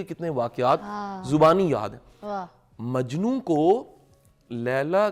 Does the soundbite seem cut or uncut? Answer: uncut